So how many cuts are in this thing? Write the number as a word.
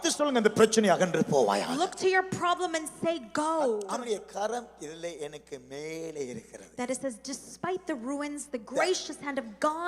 one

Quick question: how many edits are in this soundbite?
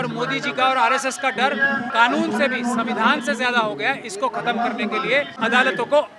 two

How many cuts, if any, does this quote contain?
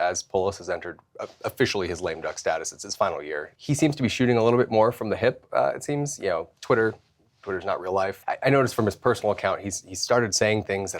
two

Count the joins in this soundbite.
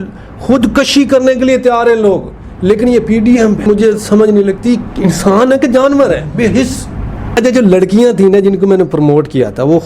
two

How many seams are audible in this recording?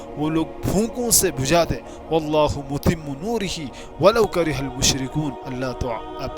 one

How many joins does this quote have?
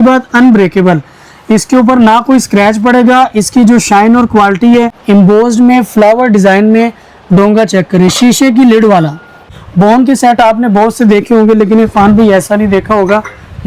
two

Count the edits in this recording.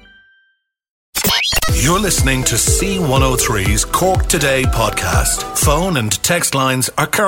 one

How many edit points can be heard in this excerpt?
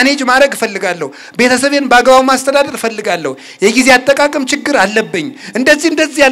zero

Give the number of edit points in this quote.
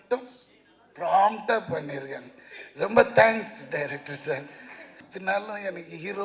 one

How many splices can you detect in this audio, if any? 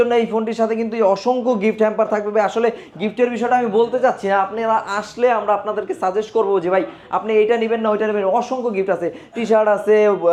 zero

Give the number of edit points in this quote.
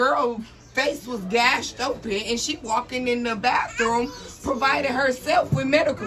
zero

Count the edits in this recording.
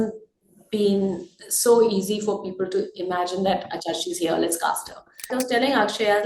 one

